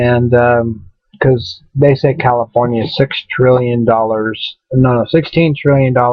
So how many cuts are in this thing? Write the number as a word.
one